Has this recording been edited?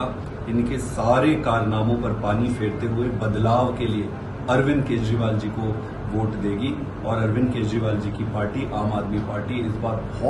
no; 0 cuts

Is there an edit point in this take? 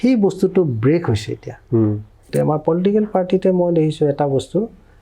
yes; 1 cut; at 2.3 s

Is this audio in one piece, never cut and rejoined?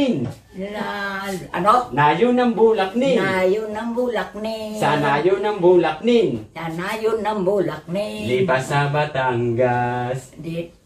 yes; 0 cuts

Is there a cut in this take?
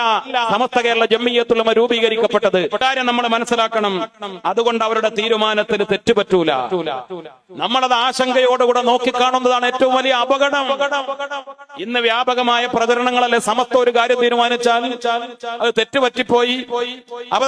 yes; 1 cut; at 2.8 s

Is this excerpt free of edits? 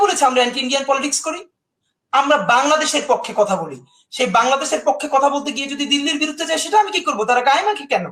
yes; 0 cuts

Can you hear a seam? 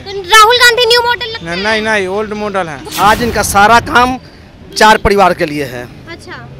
yes; 1 cut; at 2.8 s

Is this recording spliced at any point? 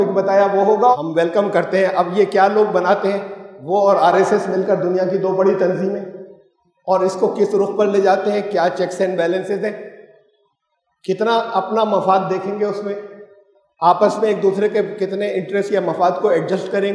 yes; 1 cut; at 0.9 s

